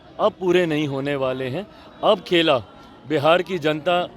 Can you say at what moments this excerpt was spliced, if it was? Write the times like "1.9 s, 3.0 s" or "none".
none

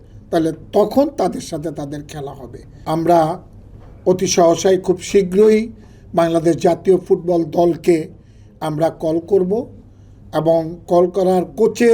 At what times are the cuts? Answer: 2.7 s

